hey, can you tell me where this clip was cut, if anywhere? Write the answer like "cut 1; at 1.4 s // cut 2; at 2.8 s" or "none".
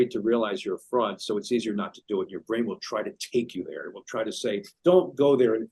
cut 1; at 4.7 s